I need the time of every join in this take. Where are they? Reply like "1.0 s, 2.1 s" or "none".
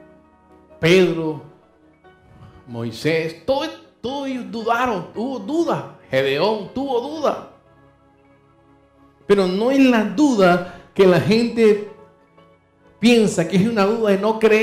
none